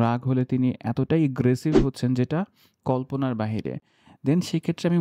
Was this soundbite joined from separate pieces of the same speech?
no; 0 cuts

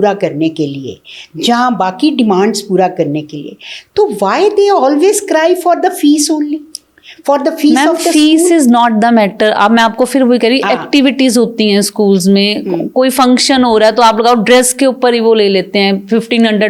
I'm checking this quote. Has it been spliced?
no; 0 cuts

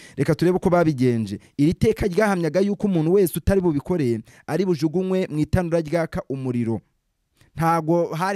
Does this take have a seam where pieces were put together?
no; 0 cuts

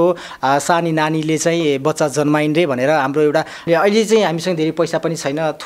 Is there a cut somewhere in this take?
yes; 1 cut; at 3.6 s

